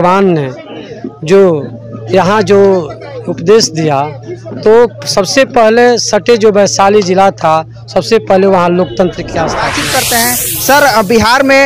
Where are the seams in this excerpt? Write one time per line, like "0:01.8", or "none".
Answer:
0:09.6